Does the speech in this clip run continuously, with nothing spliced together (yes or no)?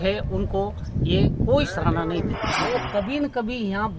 no